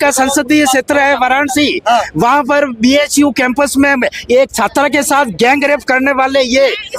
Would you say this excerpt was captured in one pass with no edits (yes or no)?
yes